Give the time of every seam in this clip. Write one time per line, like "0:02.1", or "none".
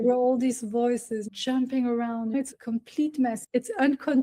0:01.3